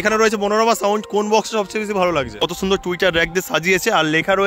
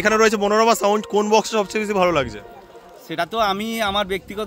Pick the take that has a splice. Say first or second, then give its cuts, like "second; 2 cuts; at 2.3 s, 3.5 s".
first; 1 cut; at 2.4 s